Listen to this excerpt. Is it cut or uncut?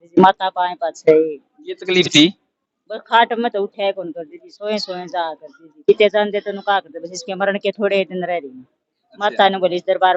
uncut